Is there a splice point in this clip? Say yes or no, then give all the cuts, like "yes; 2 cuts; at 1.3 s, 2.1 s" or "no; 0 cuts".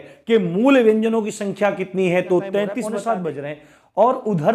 yes; 1 cut; at 2.9 s